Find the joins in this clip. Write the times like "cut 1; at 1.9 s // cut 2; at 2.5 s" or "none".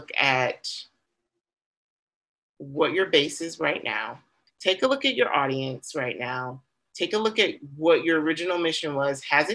cut 1; at 4.4 s

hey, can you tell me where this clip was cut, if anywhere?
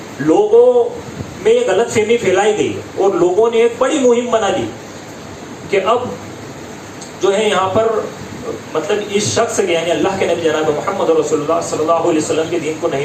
none

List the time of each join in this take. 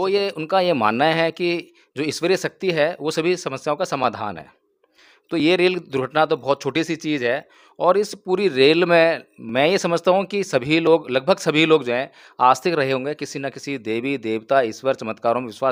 none

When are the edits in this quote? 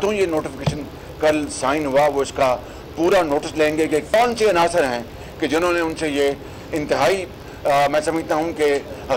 cut 1; at 4.1 s

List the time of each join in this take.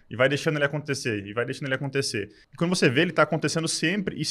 cut 1; at 2.4 s

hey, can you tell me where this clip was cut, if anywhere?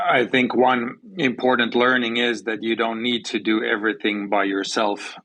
cut 1; at 1.0 s

